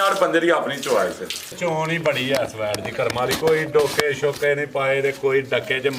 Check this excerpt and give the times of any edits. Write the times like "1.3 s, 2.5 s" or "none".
1.6 s

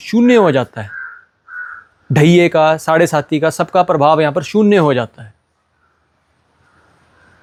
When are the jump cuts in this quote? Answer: none

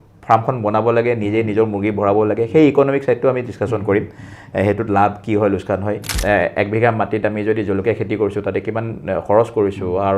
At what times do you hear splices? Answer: 6.1 s

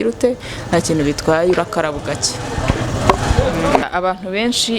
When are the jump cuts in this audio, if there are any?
3.8 s

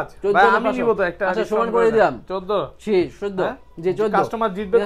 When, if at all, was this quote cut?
none

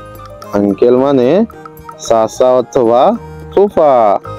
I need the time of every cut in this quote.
none

